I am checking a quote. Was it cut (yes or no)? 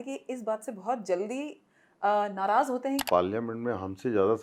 yes